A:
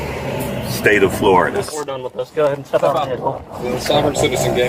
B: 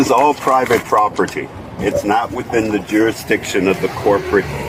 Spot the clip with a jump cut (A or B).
A